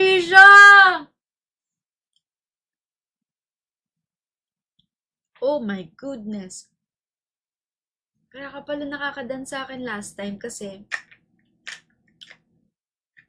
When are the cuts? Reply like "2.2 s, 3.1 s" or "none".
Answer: none